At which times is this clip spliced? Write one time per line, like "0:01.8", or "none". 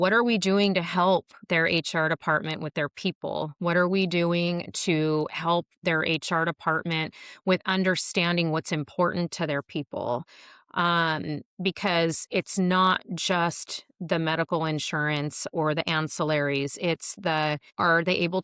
none